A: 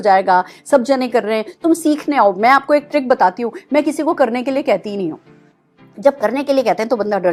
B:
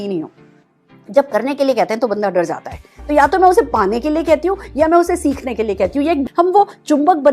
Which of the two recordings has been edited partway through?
B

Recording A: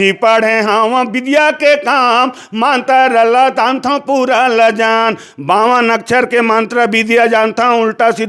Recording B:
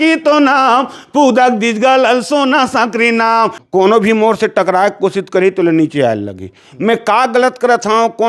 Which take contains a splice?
B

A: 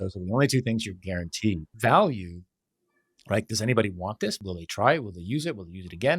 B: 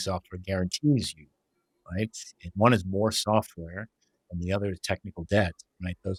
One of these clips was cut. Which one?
A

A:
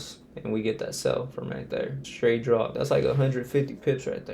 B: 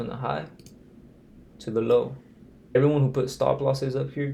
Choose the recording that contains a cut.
A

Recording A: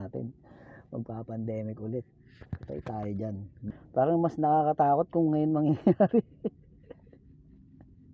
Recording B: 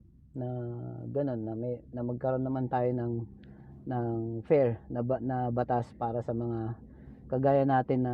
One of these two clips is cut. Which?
A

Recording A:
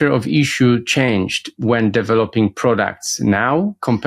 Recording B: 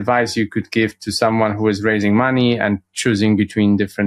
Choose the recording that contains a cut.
A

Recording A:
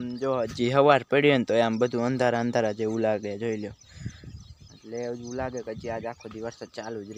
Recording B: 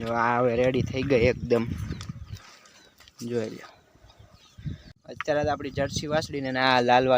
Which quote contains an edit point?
B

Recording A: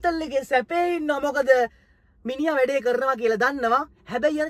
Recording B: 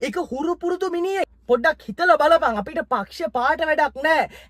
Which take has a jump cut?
B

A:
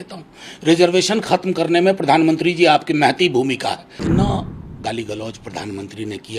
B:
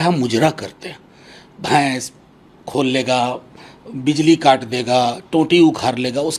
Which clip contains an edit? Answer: A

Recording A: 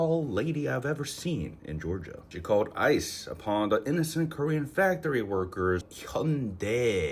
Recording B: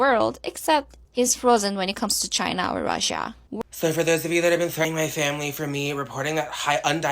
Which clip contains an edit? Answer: B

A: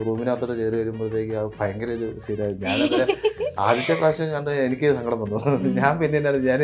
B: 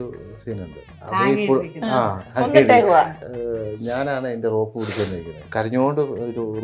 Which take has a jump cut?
B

